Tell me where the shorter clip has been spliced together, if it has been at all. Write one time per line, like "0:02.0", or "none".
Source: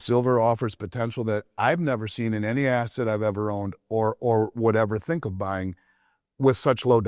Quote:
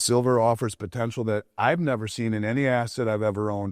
none